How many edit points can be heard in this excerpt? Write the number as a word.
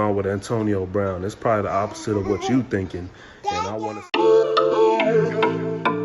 one